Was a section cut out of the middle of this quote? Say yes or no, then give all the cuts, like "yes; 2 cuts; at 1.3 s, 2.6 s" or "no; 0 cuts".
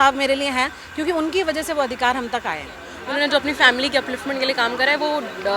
yes; 1 cut; at 2.9 s